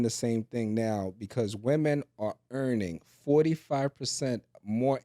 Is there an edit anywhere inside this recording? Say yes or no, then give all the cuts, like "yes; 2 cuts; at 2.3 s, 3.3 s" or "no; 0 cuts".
no; 0 cuts